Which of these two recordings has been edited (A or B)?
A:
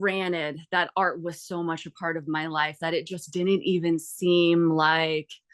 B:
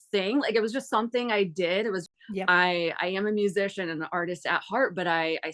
B